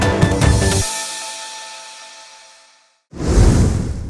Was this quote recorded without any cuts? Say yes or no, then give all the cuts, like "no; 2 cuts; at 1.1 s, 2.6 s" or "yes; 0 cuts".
no; 1 cut; at 3.1 s